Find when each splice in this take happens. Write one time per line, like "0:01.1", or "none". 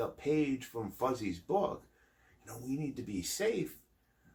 none